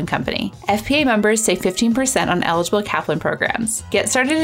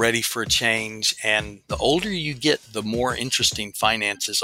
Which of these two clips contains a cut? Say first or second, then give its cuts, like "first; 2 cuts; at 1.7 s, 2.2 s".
second; 1 cut; at 1.6 s